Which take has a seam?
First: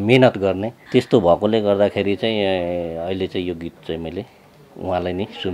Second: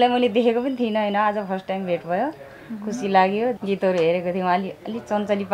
second; 1 cut; at 3.6 s

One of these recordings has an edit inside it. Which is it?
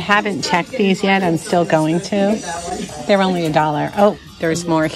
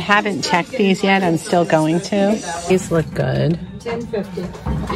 second; 1 cut; at 2.7 s

